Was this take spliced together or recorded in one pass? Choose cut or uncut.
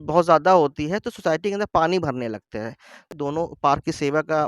cut